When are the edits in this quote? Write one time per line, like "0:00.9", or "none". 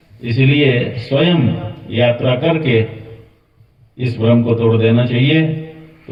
none